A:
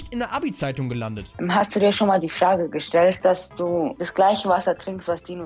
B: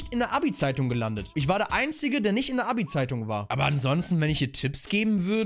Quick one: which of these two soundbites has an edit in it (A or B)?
A